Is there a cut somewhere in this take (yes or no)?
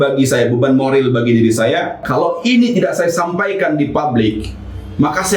yes